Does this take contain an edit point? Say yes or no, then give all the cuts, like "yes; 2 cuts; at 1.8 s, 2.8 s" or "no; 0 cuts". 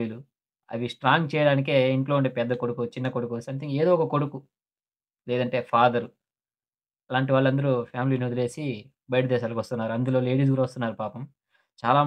no; 0 cuts